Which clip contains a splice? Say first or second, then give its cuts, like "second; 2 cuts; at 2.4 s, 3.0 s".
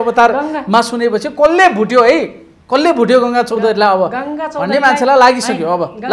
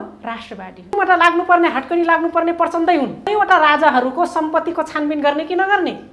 second; 2 cuts; at 0.9 s, 3.3 s